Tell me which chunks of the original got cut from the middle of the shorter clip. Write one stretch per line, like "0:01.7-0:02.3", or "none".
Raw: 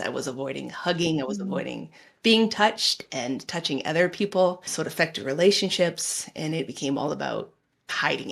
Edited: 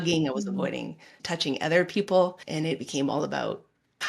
0:02.1-0:03.4
0:04.7-0:06.3